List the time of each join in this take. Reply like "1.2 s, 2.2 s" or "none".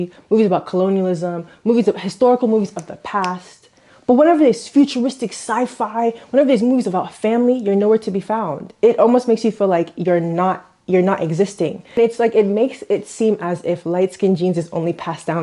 11.8 s